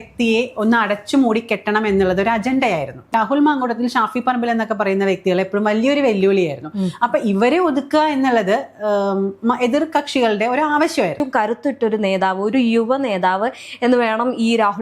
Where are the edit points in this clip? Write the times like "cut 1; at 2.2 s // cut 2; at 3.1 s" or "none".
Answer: cut 1; at 3.1 s // cut 2; at 11.2 s